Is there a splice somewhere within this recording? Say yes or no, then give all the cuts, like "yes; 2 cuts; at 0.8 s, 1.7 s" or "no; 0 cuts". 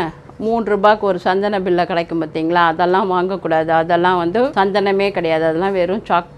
yes; 1 cut; at 4.5 s